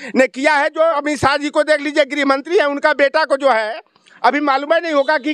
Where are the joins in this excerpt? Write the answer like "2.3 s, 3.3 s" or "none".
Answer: 1.0 s